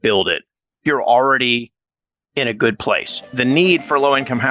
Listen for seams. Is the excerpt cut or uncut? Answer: cut